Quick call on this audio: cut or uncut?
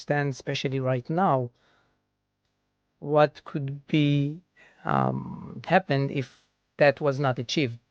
uncut